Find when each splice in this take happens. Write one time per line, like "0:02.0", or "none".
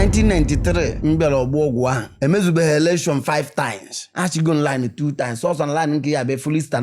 0:03.8